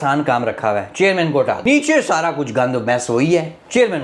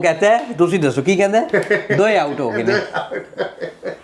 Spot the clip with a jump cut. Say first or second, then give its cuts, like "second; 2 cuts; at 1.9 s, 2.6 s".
first; 1 cut; at 1.6 s